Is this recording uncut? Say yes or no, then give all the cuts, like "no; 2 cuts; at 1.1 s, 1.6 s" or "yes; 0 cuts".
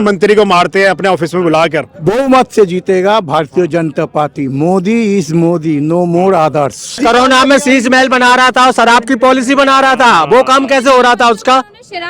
no; 2 cuts; at 1.9 s, 7.0 s